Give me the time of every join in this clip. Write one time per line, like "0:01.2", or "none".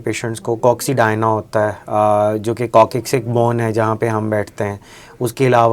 none

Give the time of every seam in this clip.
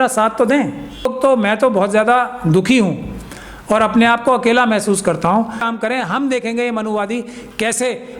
0:01.1
0:05.7

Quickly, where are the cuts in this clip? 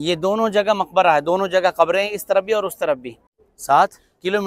0:03.2

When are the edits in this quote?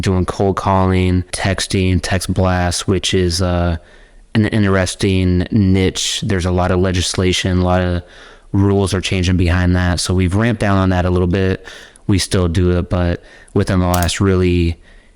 0:01.3

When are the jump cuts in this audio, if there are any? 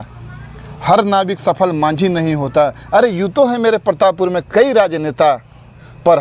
none

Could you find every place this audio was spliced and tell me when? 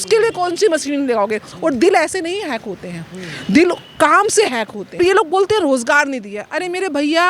0:04.9

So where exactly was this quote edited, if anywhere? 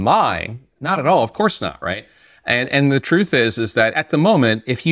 0:04.0

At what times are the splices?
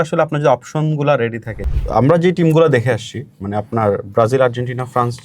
0:01.5

